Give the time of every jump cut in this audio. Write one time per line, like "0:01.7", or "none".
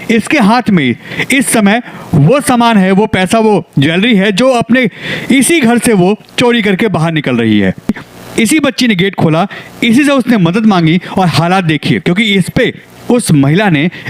0:08.0